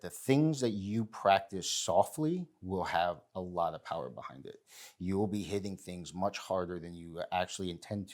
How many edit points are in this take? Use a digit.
0